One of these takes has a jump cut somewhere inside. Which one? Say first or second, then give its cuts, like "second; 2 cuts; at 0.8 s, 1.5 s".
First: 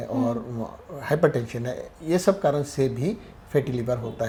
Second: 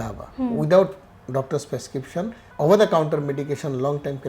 second; 1 cut; at 2.4 s